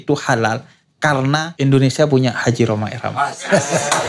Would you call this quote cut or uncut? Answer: cut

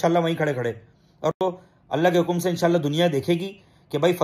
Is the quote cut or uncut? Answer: uncut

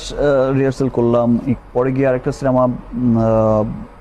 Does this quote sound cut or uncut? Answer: cut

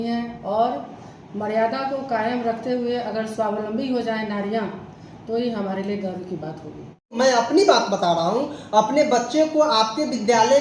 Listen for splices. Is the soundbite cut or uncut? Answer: cut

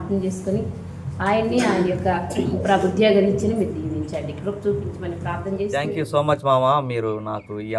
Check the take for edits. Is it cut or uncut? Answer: cut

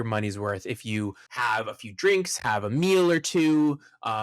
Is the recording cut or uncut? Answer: cut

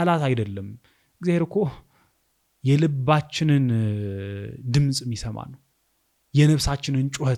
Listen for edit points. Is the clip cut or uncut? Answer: uncut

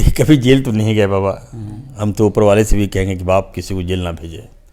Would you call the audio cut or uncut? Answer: uncut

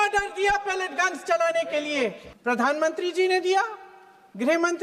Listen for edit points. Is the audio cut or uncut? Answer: cut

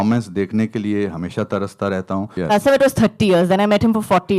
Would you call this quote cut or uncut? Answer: cut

